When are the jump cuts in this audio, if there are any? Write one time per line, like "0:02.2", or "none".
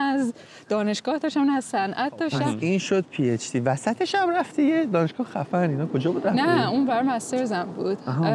0:02.6